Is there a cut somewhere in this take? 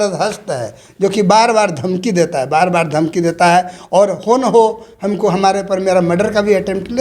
no; 0 cuts

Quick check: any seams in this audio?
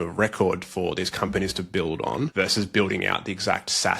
yes; 1 cut; at 2.3 s

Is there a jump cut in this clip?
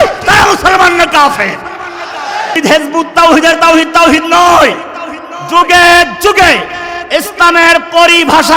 yes; 1 cut; at 2.6 s

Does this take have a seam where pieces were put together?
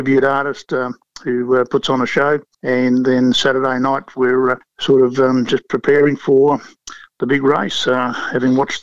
yes; 2 cuts; at 2.5 s, 4.7 s

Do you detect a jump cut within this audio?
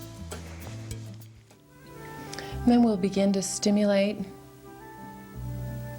yes; 1 cut; at 1.6 s

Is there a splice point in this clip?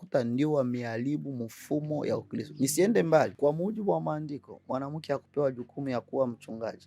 yes; 1 cut; at 3.3 s

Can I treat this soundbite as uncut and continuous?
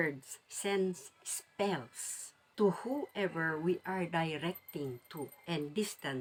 yes; 0 cuts

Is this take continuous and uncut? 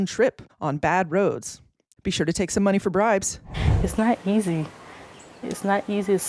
no; 2 cuts; at 1.9 s, 3.5 s

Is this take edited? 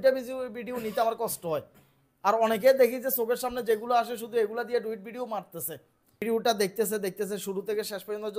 yes; 1 cut; at 6.2 s

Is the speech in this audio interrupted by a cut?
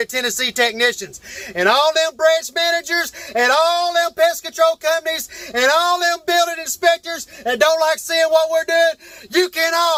no; 0 cuts

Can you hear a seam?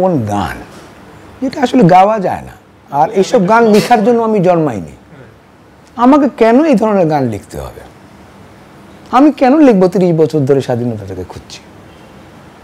no; 0 cuts

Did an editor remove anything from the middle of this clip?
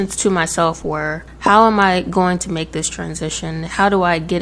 no; 0 cuts

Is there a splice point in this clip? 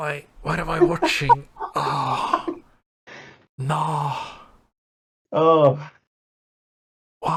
no; 0 cuts

